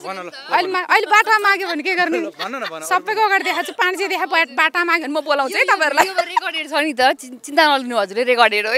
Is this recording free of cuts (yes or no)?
yes